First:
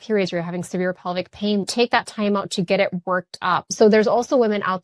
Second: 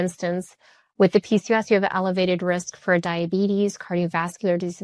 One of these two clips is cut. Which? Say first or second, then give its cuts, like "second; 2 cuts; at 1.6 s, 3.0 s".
first; 2 cuts; at 1.7 s, 3.7 s